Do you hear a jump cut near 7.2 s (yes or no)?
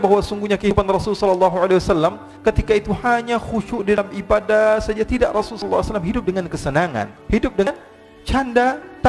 yes